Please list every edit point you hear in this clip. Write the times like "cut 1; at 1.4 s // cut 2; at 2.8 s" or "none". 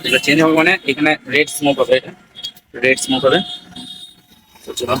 none